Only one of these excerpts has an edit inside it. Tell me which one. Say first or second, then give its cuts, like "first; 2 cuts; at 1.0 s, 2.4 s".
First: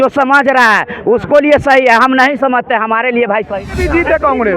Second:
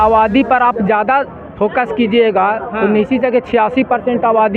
first; 1 cut; at 3.7 s